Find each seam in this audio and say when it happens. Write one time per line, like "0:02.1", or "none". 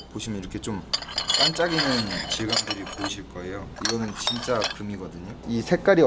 none